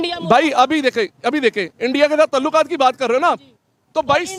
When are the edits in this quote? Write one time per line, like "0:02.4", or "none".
none